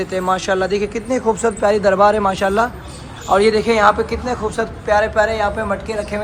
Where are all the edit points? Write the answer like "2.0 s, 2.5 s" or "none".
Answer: none